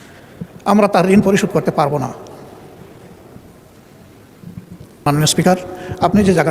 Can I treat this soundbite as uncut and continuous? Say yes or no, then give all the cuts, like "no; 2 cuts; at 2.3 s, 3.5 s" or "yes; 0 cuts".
no; 1 cut; at 5.0 s